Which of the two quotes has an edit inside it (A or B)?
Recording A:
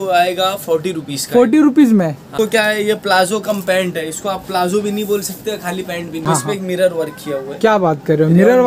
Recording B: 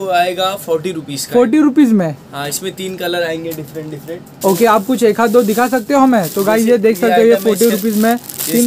A